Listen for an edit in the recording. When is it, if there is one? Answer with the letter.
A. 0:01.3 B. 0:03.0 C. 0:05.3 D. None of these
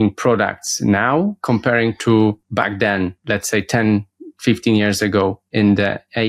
B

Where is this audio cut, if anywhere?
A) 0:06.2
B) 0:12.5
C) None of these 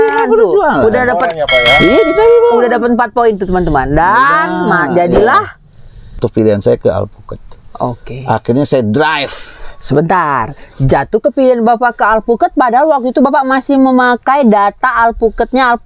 A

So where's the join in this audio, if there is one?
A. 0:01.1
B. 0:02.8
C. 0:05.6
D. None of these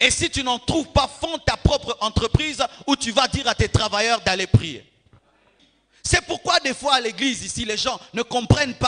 C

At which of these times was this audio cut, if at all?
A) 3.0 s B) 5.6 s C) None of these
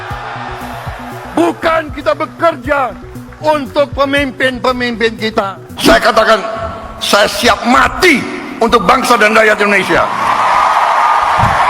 B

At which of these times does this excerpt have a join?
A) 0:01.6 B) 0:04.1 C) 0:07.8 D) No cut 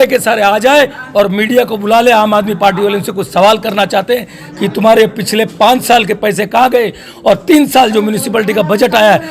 D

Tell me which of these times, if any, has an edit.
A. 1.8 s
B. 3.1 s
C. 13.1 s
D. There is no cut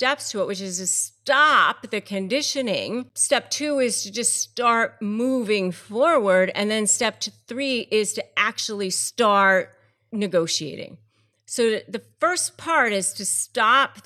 B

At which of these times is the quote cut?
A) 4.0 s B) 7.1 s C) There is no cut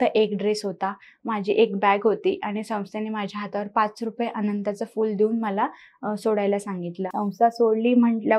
B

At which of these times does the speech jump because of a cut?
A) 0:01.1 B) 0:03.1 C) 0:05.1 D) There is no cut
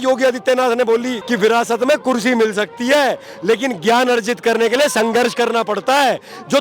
A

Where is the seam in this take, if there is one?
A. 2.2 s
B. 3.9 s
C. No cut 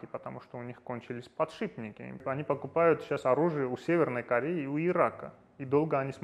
A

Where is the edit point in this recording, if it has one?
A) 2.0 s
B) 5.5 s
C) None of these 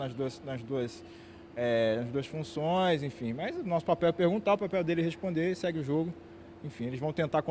C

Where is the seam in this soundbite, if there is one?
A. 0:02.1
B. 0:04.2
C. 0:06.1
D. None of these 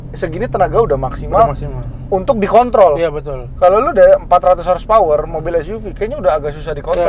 D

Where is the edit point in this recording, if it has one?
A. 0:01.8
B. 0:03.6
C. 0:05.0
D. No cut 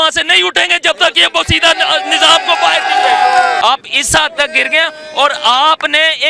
B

